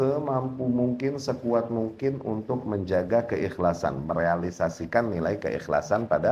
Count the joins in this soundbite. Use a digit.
0